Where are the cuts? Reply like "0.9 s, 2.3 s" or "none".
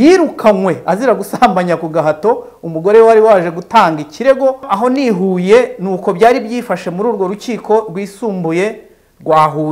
4.7 s